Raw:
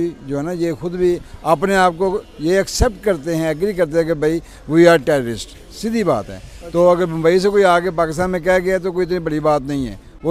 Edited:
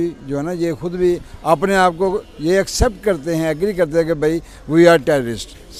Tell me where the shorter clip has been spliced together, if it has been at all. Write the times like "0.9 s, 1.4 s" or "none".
none